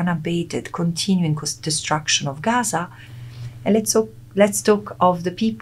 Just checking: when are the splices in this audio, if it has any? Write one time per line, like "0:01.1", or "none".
none